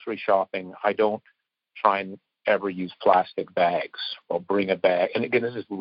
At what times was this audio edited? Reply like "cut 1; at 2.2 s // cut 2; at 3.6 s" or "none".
cut 1; at 4.1 s